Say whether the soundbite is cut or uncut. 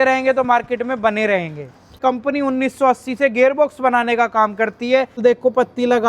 cut